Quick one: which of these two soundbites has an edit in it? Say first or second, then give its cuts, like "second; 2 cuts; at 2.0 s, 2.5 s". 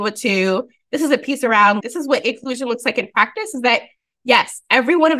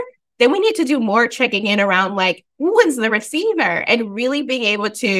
first; 1 cut; at 1.8 s